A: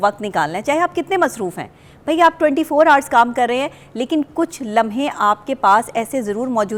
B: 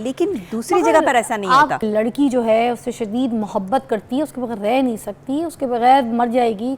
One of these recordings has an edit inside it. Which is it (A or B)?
B